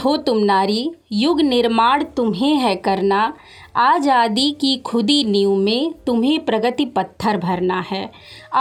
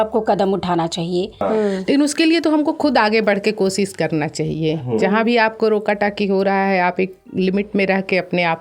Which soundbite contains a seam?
second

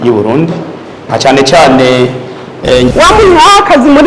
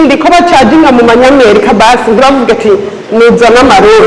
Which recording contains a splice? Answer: first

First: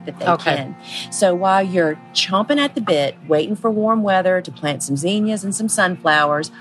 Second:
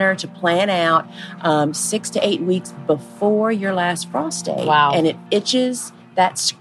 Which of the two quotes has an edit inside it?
second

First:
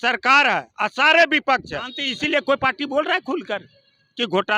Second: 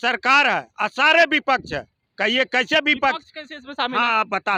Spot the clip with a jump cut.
first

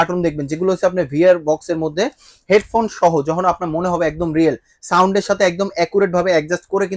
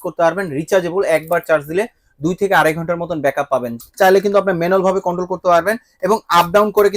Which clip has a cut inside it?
second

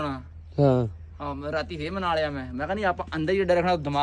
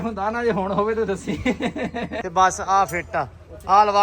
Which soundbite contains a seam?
second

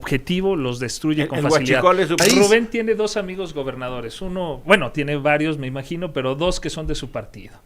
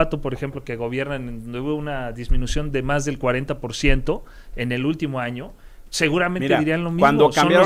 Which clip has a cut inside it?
first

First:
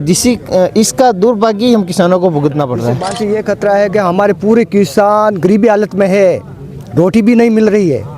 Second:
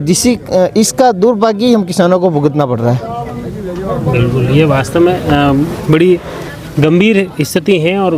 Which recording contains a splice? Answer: first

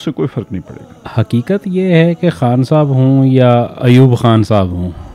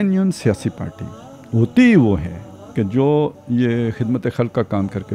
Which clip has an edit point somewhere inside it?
first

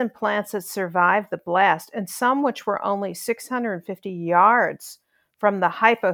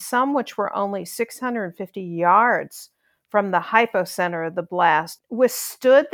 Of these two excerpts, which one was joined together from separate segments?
second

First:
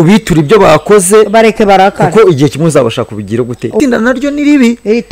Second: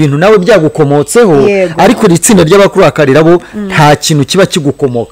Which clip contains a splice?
first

